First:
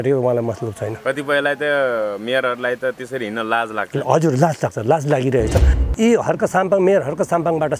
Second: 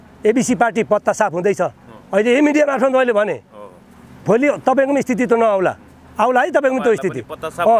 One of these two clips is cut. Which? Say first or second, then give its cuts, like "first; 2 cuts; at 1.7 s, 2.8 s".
first; 1 cut; at 5.7 s